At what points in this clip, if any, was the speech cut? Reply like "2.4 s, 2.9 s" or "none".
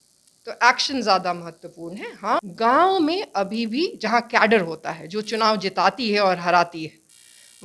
2.5 s